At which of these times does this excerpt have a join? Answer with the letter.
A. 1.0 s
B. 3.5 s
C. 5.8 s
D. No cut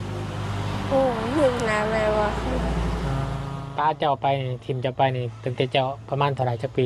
B